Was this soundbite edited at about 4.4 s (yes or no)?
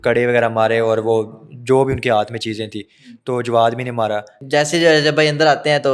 yes